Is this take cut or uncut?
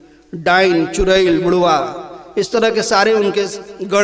uncut